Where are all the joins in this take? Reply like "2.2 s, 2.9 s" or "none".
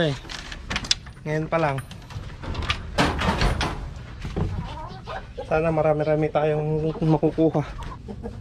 none

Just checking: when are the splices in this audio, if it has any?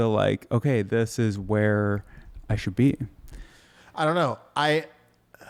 none

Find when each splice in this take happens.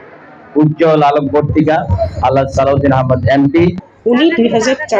3.8 s

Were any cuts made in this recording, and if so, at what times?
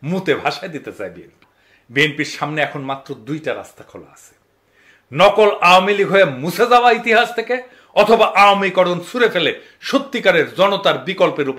1.2 s

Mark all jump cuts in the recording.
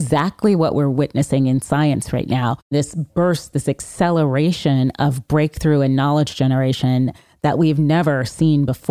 2.7 s

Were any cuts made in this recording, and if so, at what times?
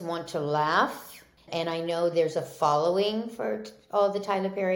1.4 s

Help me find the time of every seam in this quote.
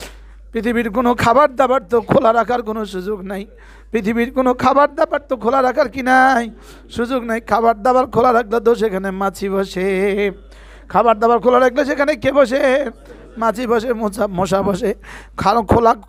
none

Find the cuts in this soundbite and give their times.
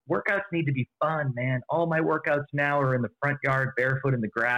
none

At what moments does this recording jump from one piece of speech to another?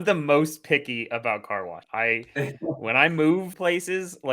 1.8 s, 3.5 s

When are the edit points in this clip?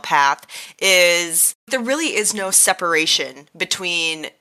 1.7 s

